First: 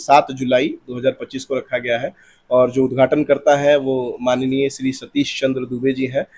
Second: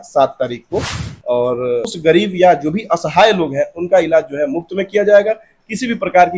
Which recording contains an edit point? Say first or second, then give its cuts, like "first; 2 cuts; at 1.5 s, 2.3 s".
second; 1 cut; at 1.9 s